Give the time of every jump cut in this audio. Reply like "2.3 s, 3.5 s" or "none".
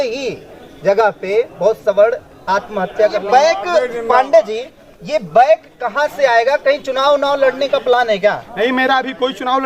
3.2 s